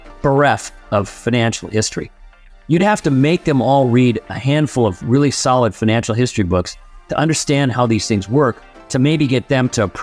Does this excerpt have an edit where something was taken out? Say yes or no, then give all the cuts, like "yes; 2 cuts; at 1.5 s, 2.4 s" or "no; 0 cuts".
no; 0 cuts